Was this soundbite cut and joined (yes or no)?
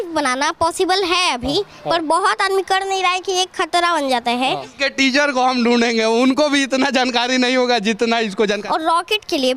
yes